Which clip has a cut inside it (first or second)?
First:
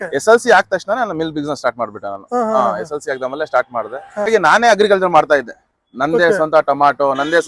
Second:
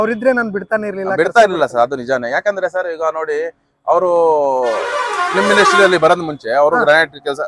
first